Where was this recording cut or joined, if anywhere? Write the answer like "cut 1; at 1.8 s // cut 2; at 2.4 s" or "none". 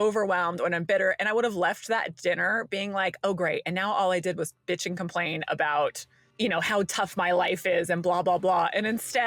none